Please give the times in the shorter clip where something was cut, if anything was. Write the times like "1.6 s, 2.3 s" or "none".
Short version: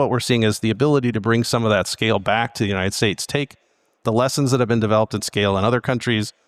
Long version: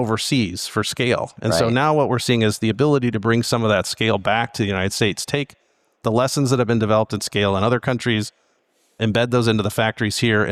none

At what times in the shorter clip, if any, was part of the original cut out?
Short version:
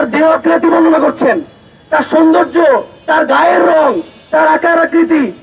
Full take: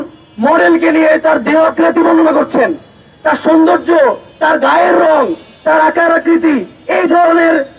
none

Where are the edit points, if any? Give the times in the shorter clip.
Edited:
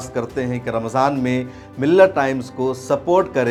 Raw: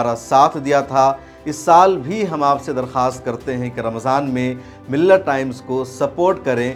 none

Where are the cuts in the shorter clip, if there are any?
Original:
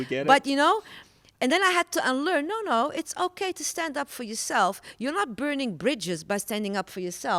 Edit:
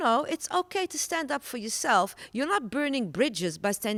none

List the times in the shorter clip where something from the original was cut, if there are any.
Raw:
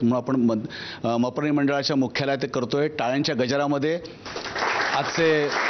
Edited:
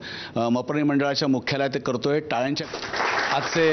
2.6 s

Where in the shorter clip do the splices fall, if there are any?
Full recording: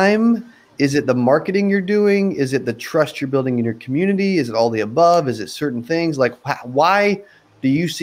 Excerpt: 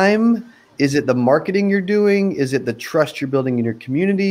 none

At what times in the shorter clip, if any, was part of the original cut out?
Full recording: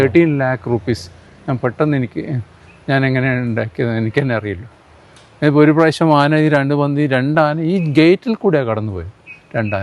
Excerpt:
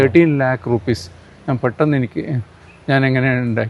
none

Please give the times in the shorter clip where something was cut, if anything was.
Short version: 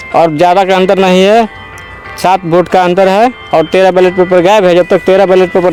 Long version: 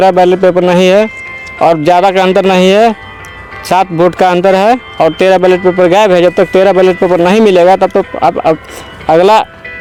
none

